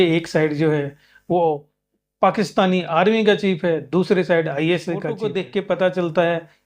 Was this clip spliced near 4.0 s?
no; 1 cut; at 5.2 s

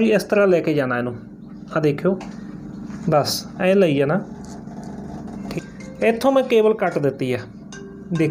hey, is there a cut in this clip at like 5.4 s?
yes; 1 cut; at 5.4 s

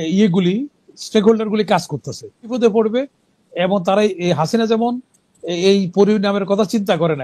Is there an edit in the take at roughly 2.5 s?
yes; 1 cut; at 2.5 s

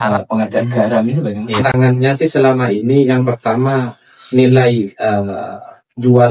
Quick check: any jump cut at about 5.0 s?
no; 1 cut; at 1.5 s

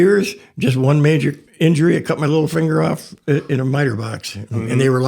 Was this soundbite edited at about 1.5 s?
yes; 1 cut; at 1.5 s

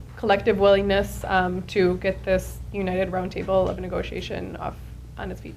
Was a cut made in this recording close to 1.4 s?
yes; 1 cut; at 1.4 s

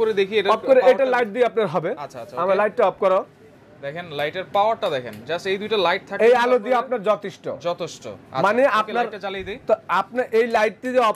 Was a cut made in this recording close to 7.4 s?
no; 0 cuts

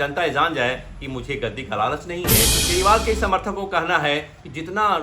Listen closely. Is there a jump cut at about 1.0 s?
no; 1 cut; at 2.6 s

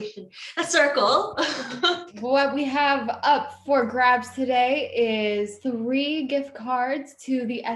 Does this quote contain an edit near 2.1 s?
yes; 2 cuts; at 2.1 s, 5.5 s

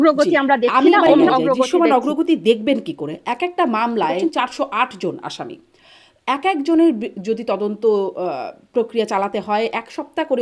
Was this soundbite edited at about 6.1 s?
no; 2 cuts; at 1.3 s, 4.2 s

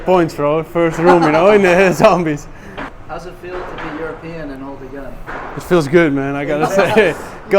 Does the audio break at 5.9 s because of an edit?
no; 1 cut; at 2.9 s

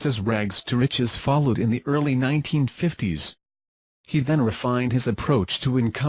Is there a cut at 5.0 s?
yes; 1 cut; at 5.0 s

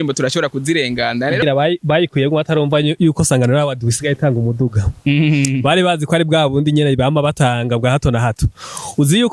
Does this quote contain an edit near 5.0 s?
no; 1 cut; at 1.4 s

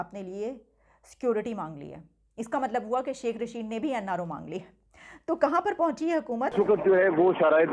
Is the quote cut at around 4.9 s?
no; 1 cut; at 6.5 s

